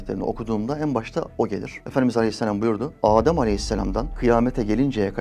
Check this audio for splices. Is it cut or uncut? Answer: uncut